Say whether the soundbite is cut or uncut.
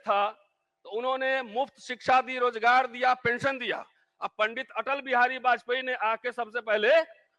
uncut